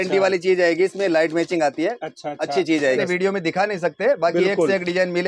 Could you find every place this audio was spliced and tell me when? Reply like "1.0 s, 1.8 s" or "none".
3.0 s